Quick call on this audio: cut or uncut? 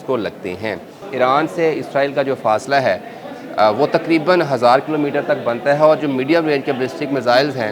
cut